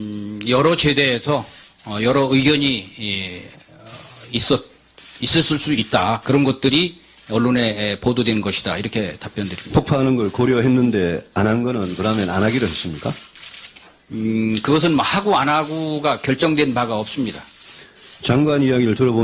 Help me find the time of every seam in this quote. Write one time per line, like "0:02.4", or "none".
0:09.1

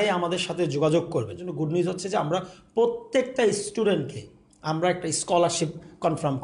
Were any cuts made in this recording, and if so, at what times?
0:01.5

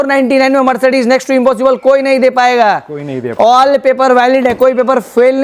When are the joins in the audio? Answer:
none

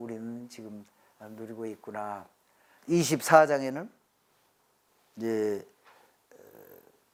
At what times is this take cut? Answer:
none

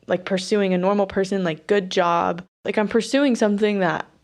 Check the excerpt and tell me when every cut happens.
0:02.6

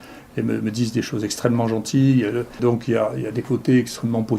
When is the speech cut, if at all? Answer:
0:02.6

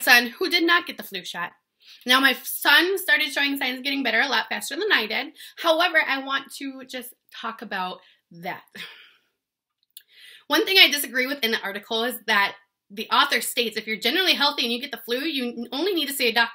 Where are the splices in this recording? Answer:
none

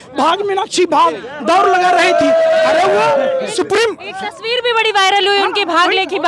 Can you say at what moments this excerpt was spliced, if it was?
none

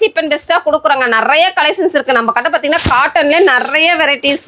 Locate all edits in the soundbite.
none

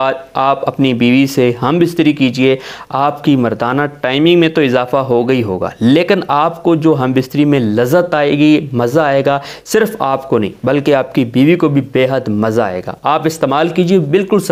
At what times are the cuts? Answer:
none

